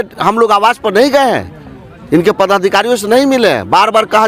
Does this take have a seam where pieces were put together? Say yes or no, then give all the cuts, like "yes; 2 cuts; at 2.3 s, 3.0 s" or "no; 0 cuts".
no; 0 cuts